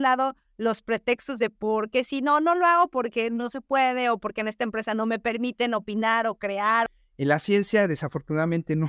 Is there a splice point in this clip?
yes; 1 cut; at 6.9 s

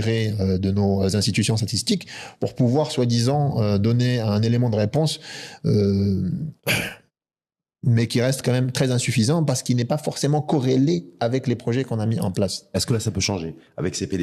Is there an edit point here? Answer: no; 0 cuts

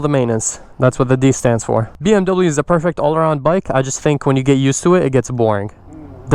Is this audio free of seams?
no; 1 cut; at 2.0 s

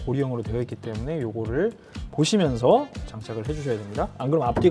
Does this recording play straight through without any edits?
yes; 0 cuts

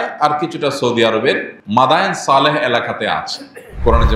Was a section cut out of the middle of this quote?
yes; 1 cut; at 1.5 s

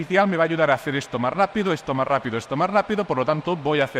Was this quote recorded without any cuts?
yes; 0 cuts

